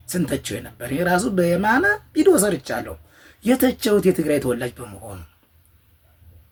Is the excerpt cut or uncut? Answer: uncut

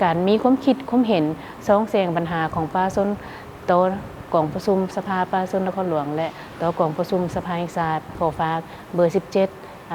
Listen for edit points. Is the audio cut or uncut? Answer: cut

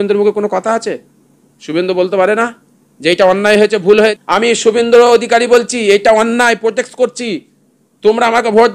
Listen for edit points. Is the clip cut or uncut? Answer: cut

